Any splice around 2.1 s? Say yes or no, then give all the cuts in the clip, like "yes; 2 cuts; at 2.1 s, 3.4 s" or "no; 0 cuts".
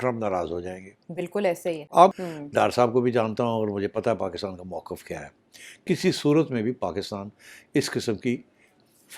yes; 1 cut; at 2.1 s